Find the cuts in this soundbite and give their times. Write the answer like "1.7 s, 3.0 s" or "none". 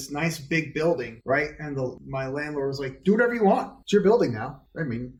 none